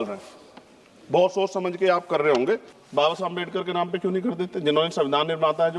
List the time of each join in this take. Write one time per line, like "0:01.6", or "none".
0:02.8